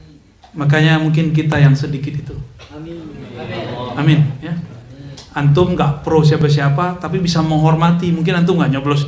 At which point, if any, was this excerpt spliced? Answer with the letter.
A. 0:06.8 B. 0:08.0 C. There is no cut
C